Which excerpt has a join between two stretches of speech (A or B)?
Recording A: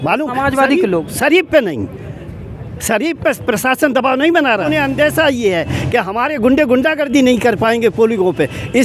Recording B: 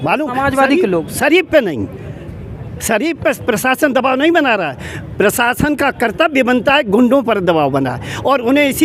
A